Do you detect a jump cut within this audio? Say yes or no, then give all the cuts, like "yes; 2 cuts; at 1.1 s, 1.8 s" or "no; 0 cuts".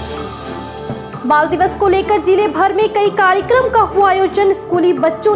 yes; 1 cut; at 1.0 s